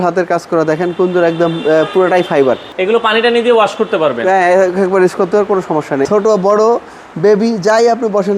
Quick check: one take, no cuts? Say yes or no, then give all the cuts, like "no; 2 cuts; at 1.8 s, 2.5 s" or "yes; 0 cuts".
no; 2 cuts; at 2.7 s, 6.0 s